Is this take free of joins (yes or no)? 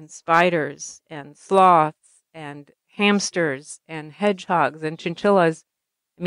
yes